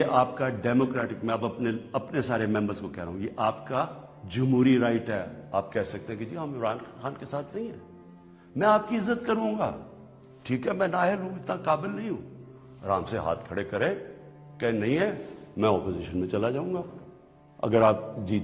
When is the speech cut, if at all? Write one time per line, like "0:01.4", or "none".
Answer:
none